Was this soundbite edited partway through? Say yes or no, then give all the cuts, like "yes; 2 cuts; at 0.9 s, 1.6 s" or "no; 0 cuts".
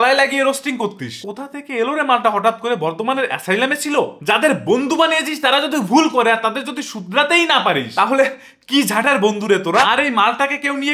yes; 3 cuts; at 1.3 s, 4.1 s, 9.9 s